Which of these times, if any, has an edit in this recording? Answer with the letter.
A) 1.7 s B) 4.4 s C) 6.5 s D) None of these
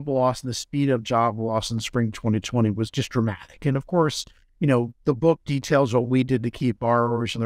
D